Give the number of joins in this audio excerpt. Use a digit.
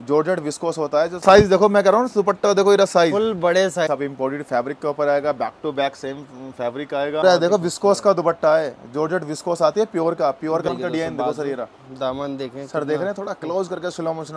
4